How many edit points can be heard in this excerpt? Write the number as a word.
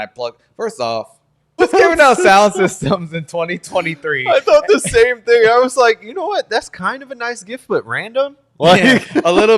one